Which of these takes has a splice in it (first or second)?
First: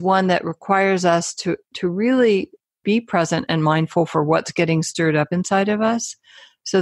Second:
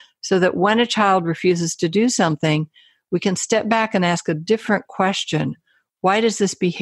first